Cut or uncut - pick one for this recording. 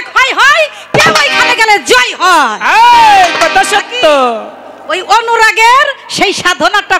uncut